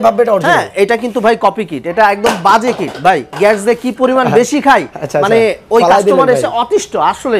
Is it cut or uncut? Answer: uncut